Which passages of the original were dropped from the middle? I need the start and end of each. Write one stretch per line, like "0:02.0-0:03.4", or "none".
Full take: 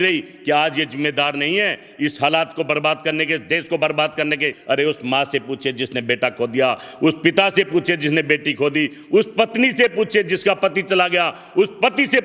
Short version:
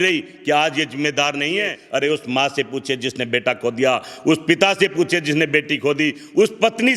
0:01.8-0:04.6